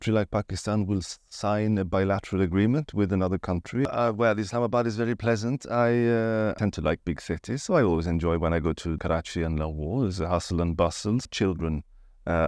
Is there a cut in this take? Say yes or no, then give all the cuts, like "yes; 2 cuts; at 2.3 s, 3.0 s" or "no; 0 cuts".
yes; 4 cuts; at 3.9 s, 6.6 s, 9.0 s, 11.3 s